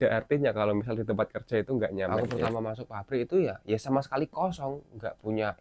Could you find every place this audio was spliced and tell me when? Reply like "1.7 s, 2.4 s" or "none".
2.3 s